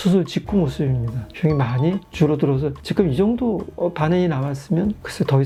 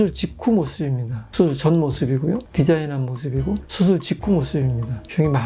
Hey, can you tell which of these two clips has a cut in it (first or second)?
second